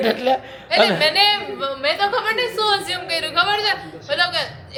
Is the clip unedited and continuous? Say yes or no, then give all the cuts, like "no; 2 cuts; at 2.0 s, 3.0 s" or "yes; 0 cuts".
yes; 0 cuts